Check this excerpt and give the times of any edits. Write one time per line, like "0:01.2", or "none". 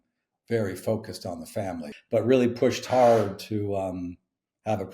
0:02.0